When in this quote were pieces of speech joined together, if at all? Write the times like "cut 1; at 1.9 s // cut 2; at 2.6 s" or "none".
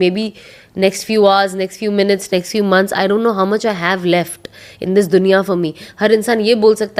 none